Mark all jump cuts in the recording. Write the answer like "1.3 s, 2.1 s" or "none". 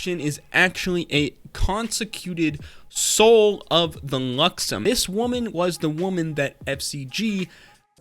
4.8 s